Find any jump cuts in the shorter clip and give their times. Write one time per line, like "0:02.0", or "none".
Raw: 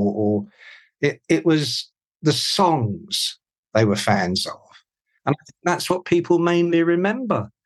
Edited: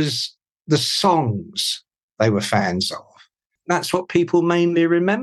0:03.5

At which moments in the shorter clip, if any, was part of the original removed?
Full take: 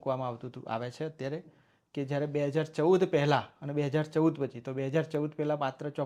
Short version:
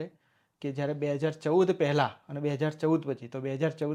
none

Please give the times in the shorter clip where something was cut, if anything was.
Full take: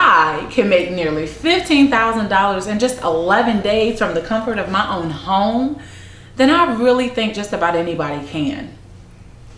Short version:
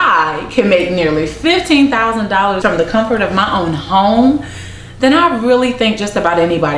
0:02.6

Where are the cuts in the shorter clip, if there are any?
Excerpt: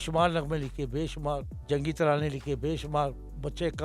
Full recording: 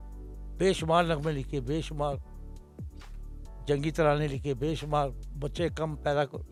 0:01.5

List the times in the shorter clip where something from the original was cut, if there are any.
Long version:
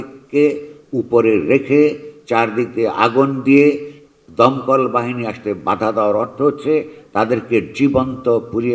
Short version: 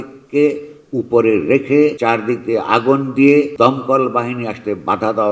0:02.0
0:03.5

